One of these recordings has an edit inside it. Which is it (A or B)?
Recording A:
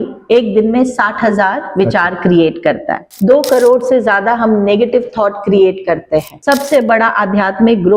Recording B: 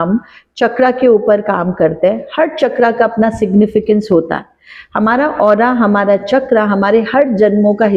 A